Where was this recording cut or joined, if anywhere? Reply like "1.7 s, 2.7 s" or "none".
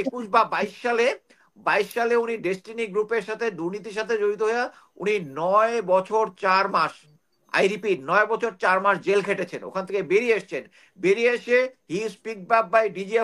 none